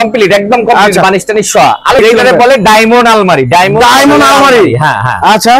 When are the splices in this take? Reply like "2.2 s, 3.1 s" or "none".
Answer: 2.0 s